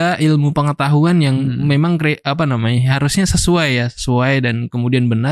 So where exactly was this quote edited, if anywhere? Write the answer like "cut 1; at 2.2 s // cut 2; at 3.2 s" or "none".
none